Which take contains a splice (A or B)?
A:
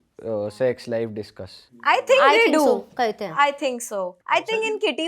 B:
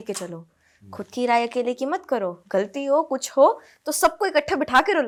A